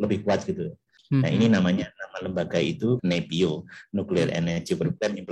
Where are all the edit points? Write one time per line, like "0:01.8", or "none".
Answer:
0:00.9
0:03.0